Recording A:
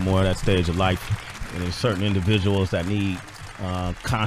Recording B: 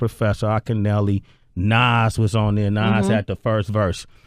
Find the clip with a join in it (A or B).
B